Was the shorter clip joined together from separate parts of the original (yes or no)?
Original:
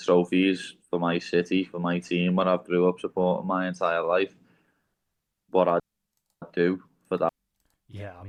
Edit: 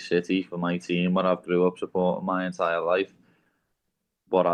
no